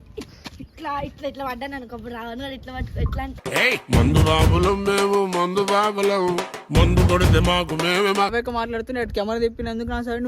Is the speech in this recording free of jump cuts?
no; 1 cut; at 8.3 s

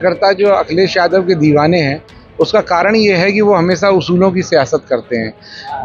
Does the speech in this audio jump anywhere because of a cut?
no; 0 cuts

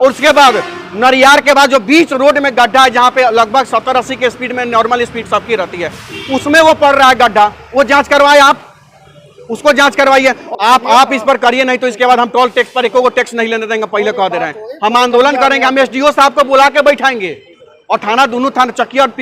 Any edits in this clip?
yes; 1 cut; at 10.4 s

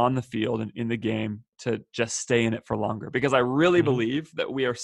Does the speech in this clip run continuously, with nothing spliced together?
no; 1 cut; at 1.5 s

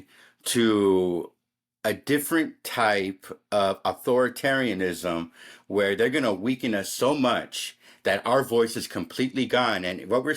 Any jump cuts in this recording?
yes; 1 cut; at 6.8 s

